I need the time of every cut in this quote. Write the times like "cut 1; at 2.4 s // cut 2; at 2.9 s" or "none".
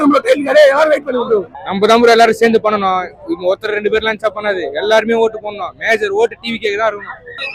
none